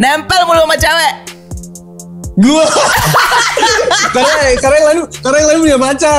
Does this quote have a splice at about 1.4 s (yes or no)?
no